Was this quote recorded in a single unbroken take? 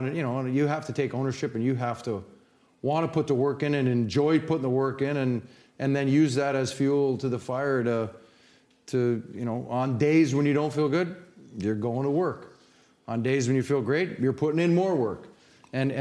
yes; 0 cuts

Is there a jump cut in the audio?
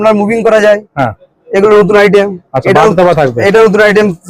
no; 0 cuts

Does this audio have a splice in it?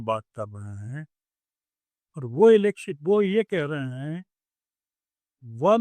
no; 0 cuts

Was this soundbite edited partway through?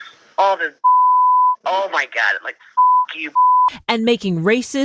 yes; 1 cut; at 3.7 s

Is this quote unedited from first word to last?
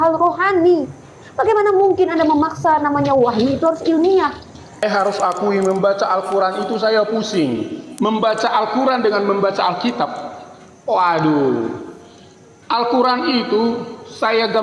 no; 2 cuts; at 4.8 s, 7.8 s

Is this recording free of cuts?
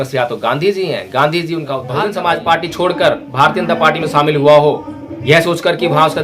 no; 1 cut; at 1.8 s

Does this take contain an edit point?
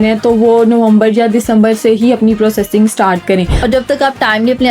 yes; 1 cut; at 3.5 s

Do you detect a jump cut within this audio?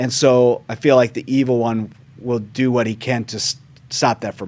no; 0 cuts

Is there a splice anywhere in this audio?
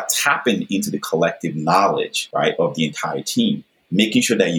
yes; 1 cut; at 2.2 s

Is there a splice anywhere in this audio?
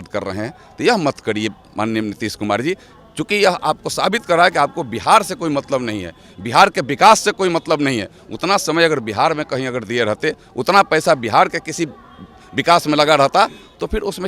no; 0 cuts

